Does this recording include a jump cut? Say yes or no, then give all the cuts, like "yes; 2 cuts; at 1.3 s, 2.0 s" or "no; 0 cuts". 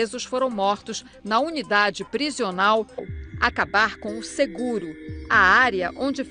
no; 0 cuts